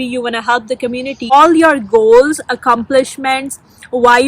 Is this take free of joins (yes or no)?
no